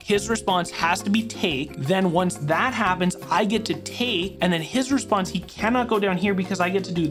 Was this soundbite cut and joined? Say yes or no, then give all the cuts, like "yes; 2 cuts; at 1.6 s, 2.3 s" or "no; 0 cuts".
no; 0 cuts